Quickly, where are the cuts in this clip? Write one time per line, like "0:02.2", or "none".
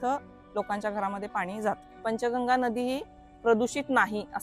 0:01.9